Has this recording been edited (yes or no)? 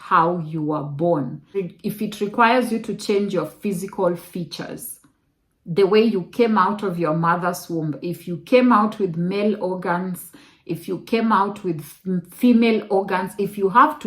yes